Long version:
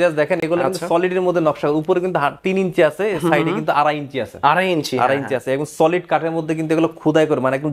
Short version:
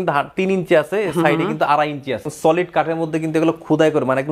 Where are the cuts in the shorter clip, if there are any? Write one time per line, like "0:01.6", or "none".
0:02.3